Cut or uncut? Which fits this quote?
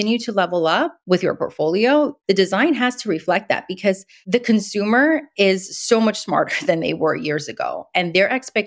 cut